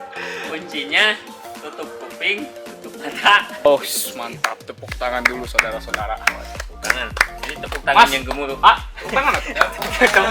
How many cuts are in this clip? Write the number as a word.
one